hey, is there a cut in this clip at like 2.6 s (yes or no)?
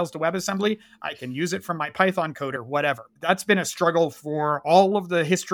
yes